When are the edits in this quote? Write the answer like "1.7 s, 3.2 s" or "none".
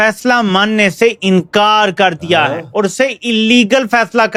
none